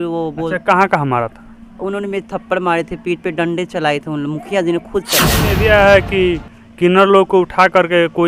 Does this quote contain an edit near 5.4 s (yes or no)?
yes